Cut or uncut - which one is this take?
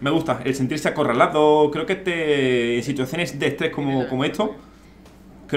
uncut